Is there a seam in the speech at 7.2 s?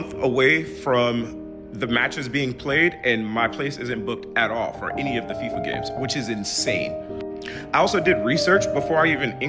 no; 0 cuts

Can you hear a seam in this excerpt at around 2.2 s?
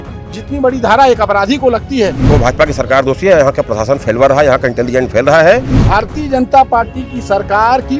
yes; 2 cuts; at 2.2 s, 5.7 s

